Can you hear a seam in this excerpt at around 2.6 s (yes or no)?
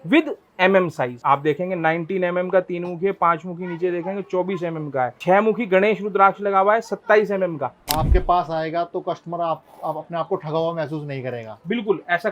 no